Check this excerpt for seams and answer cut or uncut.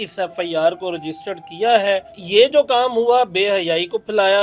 cut